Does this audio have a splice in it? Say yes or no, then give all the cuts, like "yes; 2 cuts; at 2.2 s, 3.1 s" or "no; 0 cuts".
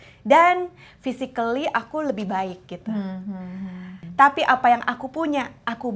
yes; 1 cut; at 4.0 s